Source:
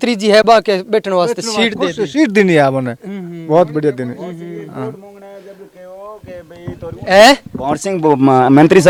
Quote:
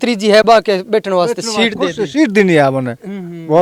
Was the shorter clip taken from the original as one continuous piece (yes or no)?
yes